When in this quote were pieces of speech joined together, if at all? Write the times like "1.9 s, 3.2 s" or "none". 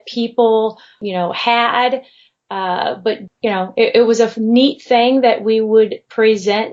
1.0 s, 3.3 s